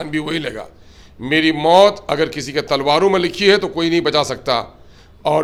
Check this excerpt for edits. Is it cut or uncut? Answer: uncut